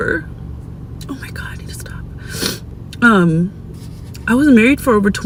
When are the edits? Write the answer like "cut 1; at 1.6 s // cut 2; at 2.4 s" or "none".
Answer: none